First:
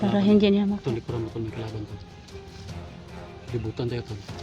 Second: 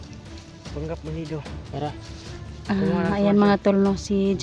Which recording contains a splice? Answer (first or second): first